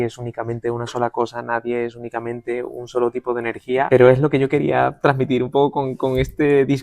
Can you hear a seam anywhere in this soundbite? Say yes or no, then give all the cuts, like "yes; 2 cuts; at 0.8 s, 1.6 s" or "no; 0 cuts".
yes; 1 cut; at 3.9 s